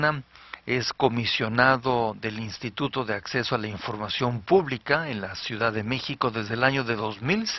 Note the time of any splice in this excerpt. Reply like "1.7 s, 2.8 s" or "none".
none